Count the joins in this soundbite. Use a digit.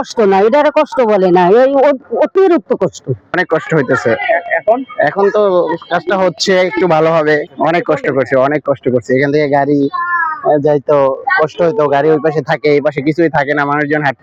0